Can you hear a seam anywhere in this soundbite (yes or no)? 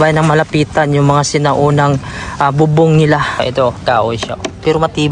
yes